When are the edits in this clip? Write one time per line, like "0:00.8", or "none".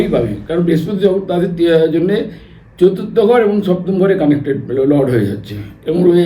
none